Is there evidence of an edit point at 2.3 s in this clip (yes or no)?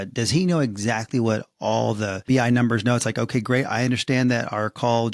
yes